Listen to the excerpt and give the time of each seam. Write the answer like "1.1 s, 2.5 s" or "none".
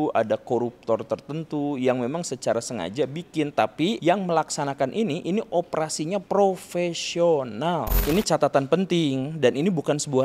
4.0 s, 6.2 s, 8.0 s